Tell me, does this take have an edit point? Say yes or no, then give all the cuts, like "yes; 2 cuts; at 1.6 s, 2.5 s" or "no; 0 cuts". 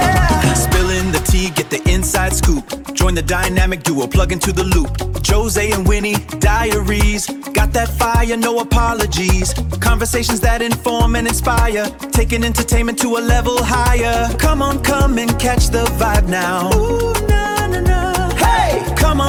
no; 0 cuts